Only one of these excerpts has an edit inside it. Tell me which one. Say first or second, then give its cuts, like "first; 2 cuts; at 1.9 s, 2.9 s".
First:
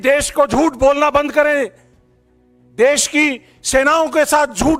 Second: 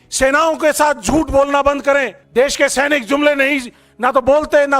second; 1 cut; at 2.2 s